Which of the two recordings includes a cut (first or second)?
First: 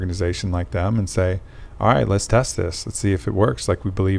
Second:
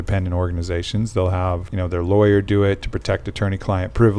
second